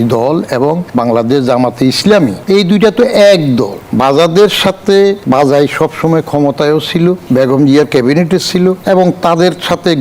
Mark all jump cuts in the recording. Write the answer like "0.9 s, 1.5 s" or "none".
0.8 s, 2.4 s, 3.8 s, 5.2 s, 7.2 s, 8.8 s